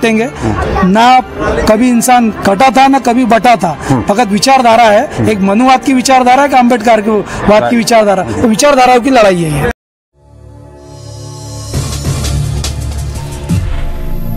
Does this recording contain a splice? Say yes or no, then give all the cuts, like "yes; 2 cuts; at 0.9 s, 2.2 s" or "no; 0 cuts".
yes; 1 cut; at 9.7 s